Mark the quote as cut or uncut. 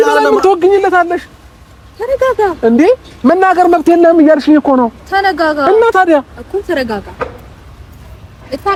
uncut